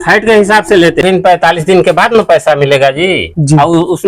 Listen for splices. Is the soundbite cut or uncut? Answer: cut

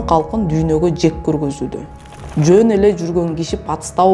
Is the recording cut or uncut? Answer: cut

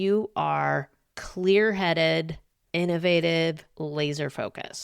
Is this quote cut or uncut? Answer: uncut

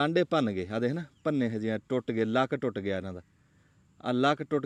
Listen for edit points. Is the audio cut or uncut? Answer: uncut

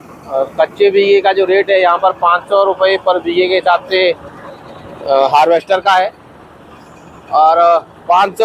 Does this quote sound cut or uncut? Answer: uncut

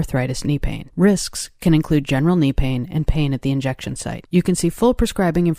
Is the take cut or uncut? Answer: uncut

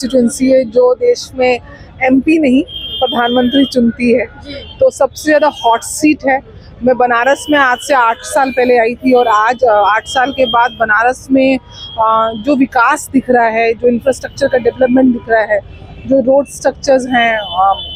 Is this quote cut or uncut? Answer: uncut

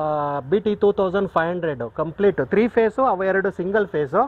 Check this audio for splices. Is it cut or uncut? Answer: uncut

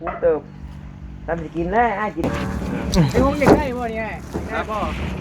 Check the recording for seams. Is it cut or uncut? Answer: cut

